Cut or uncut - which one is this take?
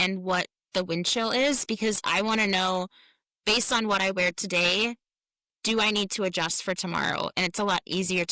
uncut